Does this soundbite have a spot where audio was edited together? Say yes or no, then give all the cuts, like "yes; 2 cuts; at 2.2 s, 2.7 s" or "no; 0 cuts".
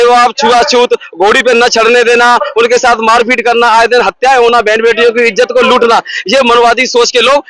no; 0 cuts